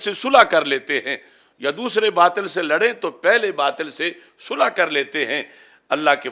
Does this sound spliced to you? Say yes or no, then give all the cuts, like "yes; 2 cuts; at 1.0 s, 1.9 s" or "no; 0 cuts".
no; 0 cuts